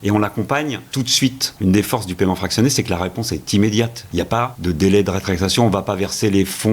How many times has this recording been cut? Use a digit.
2